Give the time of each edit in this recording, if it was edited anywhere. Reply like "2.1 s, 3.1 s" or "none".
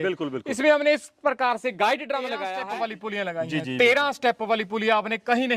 2.5 s